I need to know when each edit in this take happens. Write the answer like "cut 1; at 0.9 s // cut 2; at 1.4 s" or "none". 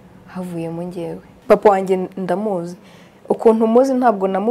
cut 1; at 1.3 s

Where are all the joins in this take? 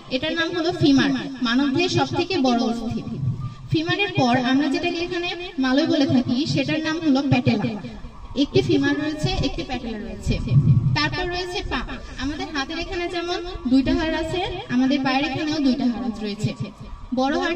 none

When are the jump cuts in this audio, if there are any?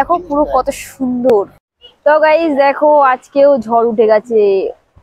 cut 1; at 1.6 s

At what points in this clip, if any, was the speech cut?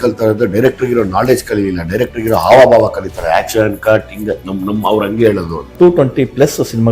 cut 1; at 5.7 s

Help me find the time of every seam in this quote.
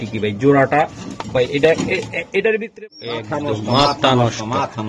cut 1; at 2.7 s

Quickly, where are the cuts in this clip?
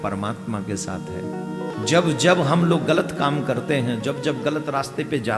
cut 1; at 1.7 s

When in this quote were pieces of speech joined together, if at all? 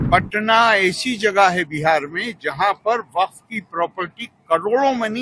none

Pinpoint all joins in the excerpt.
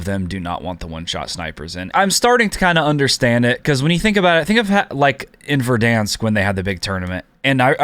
cut 1; at 1.8 s

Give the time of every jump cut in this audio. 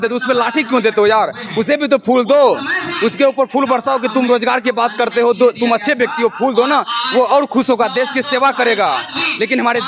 none

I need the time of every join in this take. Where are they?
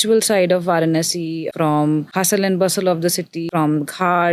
cut 1; at 1.5 s // cut 2; at 2.1 s // cut 3; at 3.5 s

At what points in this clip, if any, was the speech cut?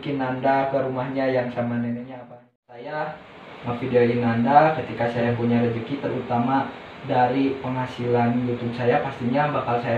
cut 1; at 2.5 s

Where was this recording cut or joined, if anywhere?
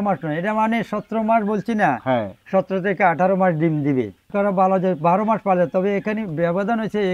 cut 1; at 4.2 s

